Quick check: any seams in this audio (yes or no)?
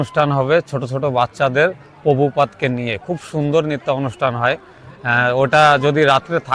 no